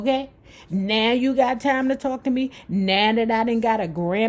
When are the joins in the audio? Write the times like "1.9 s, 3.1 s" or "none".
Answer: none